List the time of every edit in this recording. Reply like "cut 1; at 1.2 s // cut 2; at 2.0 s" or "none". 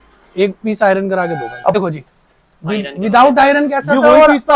cut 1; at 1.7 s